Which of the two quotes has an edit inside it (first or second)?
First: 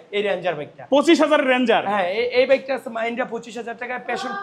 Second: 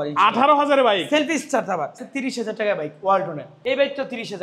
second